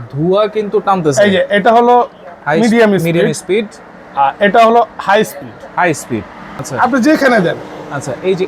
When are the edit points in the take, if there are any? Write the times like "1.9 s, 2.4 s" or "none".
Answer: 6.6 s